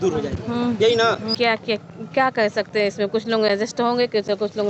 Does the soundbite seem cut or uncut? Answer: cut